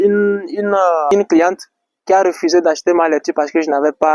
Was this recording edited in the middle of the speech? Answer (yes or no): yes